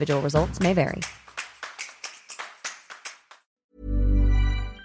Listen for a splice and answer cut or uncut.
cut